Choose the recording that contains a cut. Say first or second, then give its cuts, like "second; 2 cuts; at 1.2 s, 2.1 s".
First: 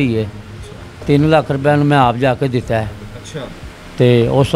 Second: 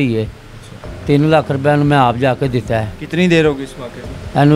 second; 1 cut; at 3.0 s